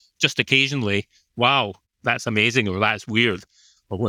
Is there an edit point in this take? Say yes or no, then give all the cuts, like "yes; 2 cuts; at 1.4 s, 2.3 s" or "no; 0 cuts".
yes; 1 cut; at 1.8 s